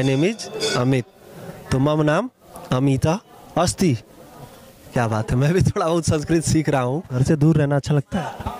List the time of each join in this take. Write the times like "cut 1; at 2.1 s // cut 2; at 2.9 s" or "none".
cut 1; at 7.1 s